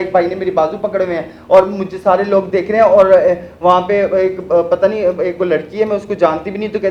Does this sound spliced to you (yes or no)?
no